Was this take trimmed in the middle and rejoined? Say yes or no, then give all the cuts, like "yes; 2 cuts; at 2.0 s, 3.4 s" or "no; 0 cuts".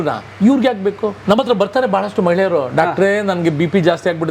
yes; 1 cut; at 1.2 s